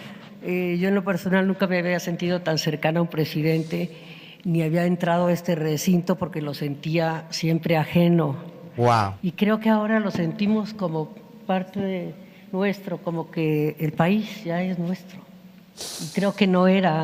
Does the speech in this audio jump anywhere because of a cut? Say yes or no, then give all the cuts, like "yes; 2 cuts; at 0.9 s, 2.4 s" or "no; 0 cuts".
no; 0 cuts